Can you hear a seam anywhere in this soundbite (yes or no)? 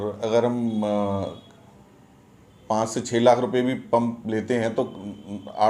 no